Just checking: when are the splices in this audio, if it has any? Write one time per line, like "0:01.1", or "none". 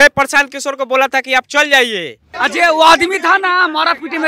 0:02.3